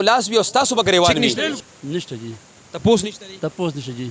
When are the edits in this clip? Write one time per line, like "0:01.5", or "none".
0:01.6